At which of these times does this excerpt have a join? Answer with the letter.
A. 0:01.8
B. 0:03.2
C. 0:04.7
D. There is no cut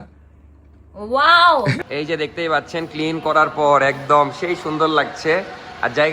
A